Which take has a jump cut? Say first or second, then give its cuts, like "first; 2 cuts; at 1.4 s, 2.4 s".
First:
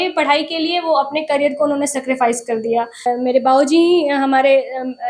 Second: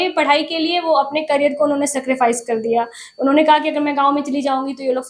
first; 1 cut; at 3.0 s